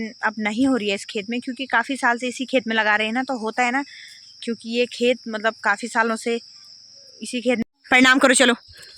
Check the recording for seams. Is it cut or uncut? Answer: cut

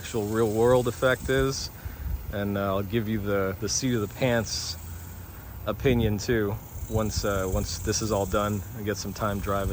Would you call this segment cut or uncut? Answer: uncut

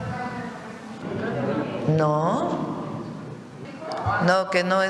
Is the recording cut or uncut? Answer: cut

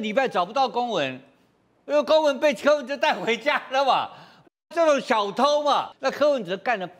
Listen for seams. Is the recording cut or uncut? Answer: cut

